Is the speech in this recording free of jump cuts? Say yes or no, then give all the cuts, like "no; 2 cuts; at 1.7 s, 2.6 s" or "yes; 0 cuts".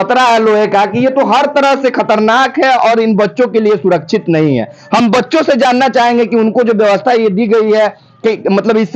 yes; 0 cuts